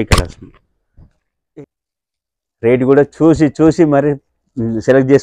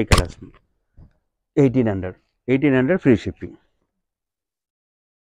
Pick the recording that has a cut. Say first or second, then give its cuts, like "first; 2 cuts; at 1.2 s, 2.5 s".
first; 1 cut; at 1.6 s